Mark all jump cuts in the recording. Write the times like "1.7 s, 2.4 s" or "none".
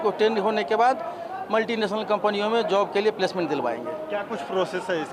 none